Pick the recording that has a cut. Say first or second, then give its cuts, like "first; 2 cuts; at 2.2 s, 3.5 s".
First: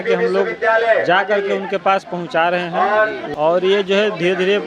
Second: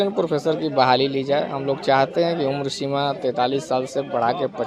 first; 1 cut; at 3.2 s